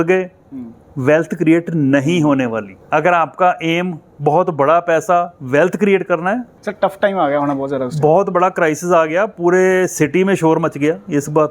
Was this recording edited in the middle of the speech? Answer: yes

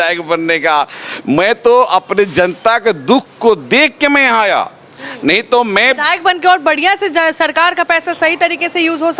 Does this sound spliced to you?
no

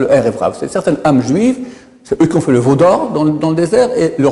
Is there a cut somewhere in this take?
no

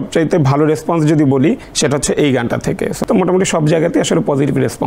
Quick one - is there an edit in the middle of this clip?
yes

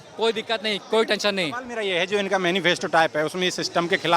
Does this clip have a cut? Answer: no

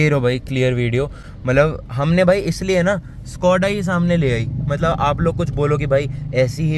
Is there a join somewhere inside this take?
no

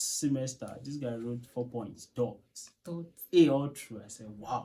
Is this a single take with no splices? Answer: yes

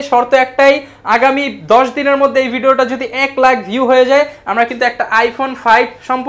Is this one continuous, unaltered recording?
yes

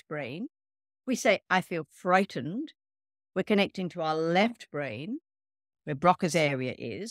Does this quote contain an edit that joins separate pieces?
no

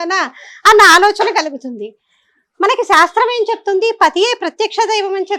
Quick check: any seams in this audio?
no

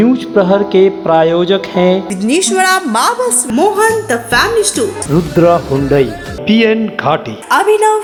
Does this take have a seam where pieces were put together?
no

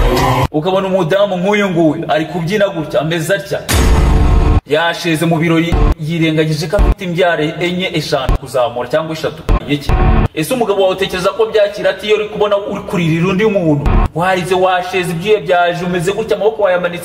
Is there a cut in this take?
yes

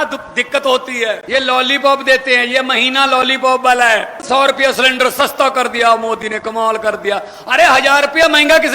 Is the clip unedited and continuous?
no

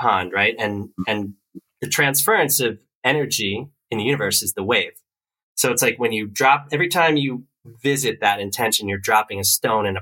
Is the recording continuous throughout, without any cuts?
yes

